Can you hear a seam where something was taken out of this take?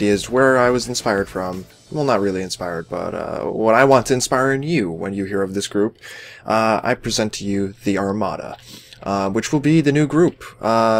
yes; 1 cut; at 8.6 s

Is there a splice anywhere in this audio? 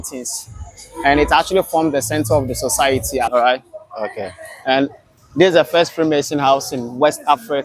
yes; 1 cut; at 3.3 s

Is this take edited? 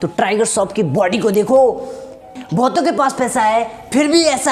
yes; 1 cut; at 2.4 s

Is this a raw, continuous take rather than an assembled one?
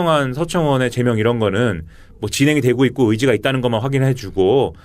no; 1 cut; at 3.6 s

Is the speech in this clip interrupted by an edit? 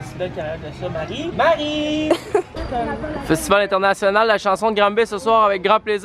yes; 1 cut; at 2.5 s

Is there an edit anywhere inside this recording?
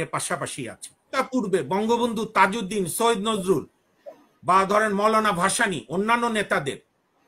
yes; 1 cut; at 1.1 s

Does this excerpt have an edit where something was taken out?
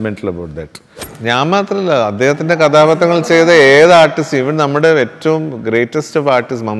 yes; 1 cut; at 1.1 s

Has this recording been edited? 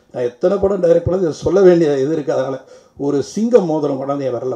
no; 0 cuts

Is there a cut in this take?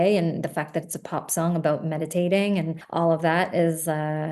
yes; 1 cut; at 2.8 s

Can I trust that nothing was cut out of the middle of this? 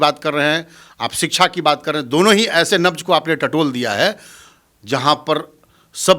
yes; 0 cuts

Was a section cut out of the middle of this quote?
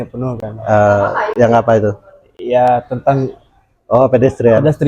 no; 0 cuts

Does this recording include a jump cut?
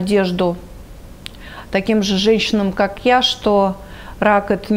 no; 0 cuts

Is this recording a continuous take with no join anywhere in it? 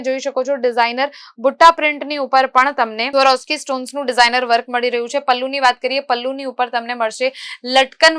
yes; 0 cuts

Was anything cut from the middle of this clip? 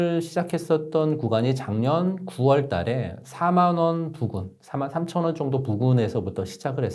no; 0 cuts

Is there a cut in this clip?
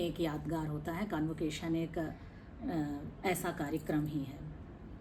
no; 0 cuts

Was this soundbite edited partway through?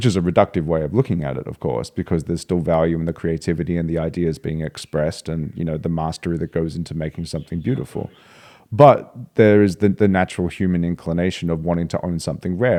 no; 0 cuts

